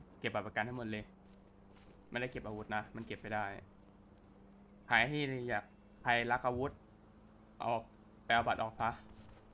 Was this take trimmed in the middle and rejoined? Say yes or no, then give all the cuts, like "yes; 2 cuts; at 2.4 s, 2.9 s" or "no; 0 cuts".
no; 0 cuts